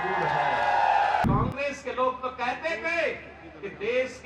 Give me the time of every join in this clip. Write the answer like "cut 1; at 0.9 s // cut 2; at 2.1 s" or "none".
cut 1; at 1.2 s